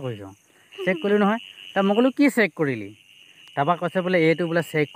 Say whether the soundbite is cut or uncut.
uncut